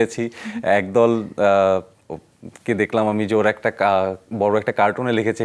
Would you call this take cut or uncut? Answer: uncut